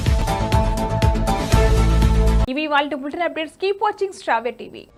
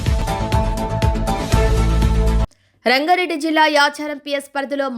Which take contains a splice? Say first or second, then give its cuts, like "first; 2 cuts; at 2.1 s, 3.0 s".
second; 1 cut; at 2.4 s